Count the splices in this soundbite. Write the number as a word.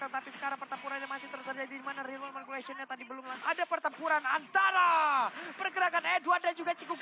one